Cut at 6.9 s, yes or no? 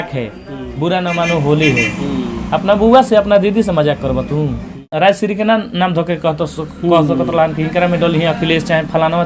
no